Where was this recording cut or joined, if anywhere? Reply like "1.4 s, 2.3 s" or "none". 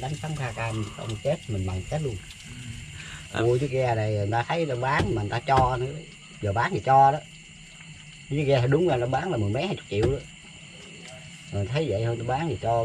3.4 s